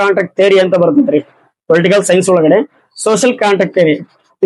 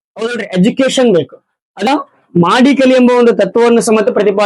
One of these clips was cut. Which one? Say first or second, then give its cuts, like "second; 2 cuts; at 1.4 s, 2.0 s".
second; 1 cut; at 1.9 s